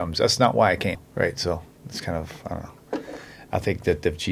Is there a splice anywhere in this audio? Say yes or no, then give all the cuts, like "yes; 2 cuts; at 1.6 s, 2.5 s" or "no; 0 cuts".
no; 0 cuts